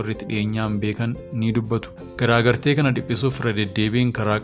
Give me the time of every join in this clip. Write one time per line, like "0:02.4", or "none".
0:01.7